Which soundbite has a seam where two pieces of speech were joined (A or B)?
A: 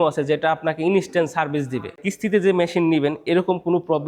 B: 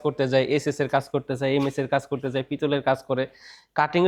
A